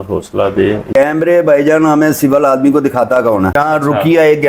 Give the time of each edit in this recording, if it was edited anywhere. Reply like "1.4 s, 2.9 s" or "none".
0.9 s, 3.6 s